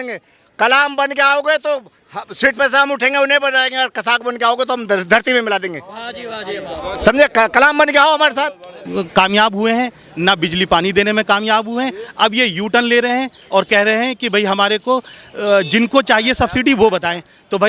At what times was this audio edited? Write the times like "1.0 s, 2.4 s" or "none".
8.8 s